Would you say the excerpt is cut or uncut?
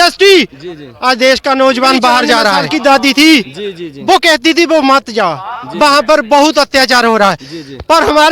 cut